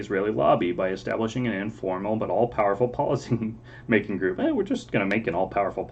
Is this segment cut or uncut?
uncut